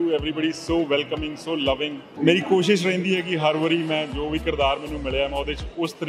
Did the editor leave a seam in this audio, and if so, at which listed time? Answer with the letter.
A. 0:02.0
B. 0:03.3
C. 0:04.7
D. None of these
A